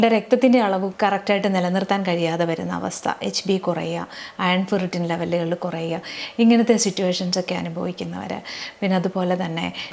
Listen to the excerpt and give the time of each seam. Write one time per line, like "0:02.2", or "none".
none